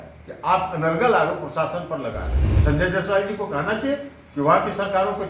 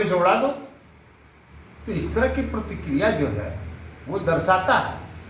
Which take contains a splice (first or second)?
first